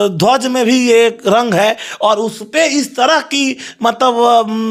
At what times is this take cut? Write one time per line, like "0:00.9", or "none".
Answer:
none